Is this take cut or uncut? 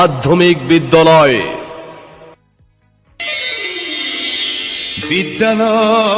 uncut